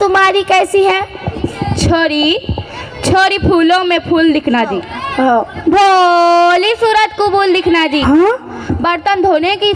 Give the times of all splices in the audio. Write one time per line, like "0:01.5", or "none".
0:08.0